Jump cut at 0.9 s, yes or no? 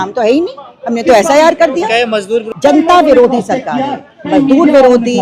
no